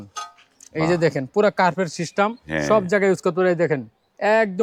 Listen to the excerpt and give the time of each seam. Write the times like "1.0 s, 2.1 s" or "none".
none